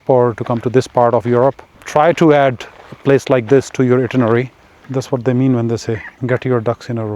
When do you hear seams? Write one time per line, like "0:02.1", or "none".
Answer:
0:01.7
0:04.8
0:06.1